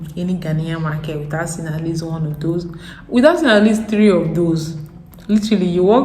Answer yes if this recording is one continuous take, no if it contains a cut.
yes